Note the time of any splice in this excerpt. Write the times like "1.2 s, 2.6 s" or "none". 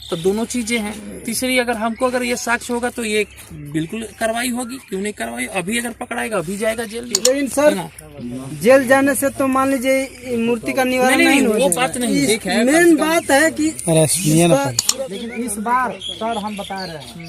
7.0 s, 14.8 s